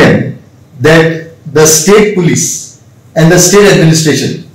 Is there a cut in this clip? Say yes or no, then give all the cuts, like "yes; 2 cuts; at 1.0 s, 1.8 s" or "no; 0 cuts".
no; 0 cuts